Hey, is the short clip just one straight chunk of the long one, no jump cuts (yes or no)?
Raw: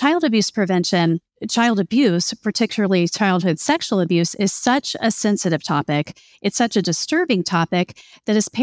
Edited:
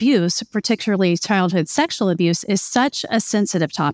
yes